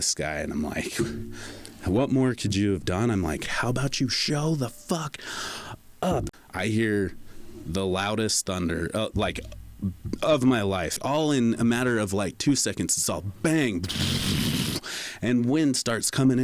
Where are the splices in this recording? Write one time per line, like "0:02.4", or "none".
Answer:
0:03.5
0:06.3
0:11.0